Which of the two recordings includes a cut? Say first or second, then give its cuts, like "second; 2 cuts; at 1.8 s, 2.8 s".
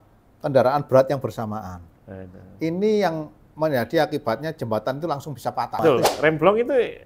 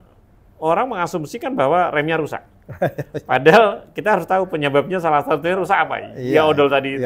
first; 1 cut; at 5.8 s